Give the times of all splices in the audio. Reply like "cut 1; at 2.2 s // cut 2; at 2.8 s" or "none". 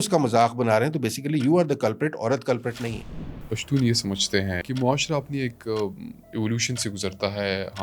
cut 1; at 3.5 s // cut 2; at 4.6 s